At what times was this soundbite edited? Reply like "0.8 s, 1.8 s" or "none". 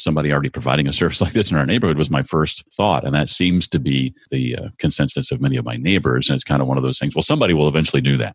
2.6 s, 4.2 s